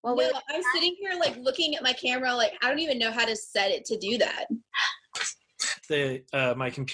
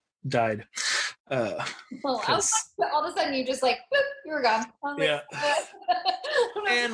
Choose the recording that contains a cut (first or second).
first